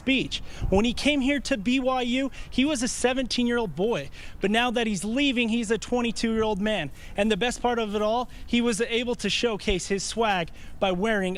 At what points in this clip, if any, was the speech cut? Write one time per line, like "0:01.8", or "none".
none